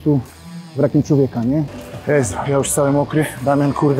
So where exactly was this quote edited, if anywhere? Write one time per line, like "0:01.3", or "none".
0:01.7